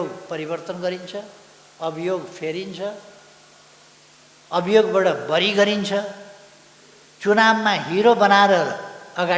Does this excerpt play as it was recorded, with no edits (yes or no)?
yes